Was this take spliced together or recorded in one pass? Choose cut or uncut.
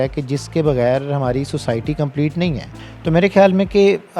uncut